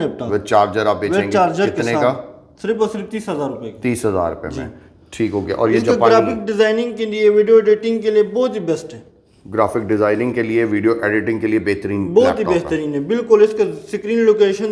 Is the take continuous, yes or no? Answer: yes